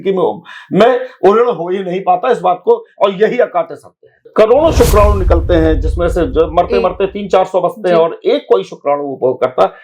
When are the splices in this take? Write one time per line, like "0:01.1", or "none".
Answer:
0:04.3